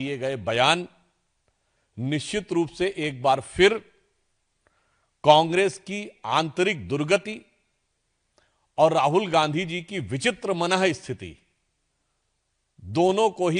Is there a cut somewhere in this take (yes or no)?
no